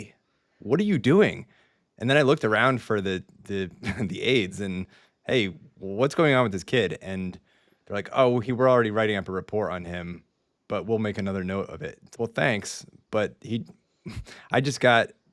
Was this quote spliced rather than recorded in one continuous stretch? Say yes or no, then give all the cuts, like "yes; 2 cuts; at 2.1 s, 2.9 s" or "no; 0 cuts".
no; 0 cuts